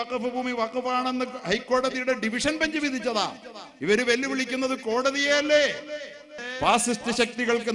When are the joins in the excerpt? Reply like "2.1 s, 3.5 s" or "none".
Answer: 6.4 s